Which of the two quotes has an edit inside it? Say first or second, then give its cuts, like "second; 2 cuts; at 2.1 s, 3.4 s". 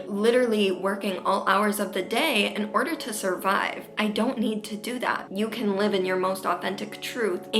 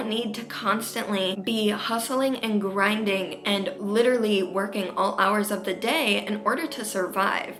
first; 1 cut; at 5.2 s